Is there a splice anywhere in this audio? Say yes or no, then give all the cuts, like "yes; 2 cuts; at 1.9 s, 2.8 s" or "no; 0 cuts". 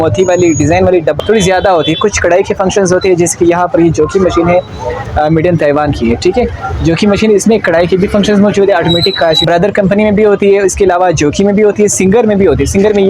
yes; 2 cuts; at 1.2 s, 9.4 s